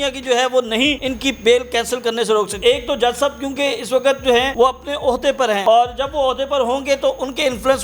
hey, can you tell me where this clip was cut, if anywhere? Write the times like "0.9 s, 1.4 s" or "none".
1.1 s, 2.6 s, 4.5 s, 5.6 s